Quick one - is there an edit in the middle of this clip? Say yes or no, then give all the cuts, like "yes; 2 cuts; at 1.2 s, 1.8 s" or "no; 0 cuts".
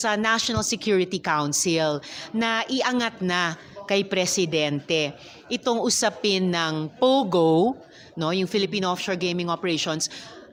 no; 0 cuts